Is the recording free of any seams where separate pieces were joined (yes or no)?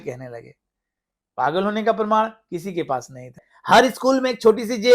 no